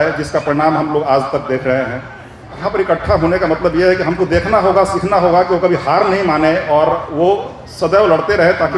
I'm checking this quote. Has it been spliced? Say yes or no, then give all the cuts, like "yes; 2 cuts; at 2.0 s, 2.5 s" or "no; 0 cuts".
yes; 1 cut; at 2.6 s